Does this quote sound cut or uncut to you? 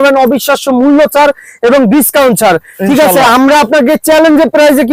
uncut